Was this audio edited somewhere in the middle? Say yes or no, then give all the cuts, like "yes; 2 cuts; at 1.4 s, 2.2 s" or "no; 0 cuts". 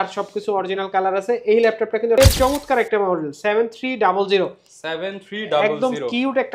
yes; 1 cut; at 2.2 s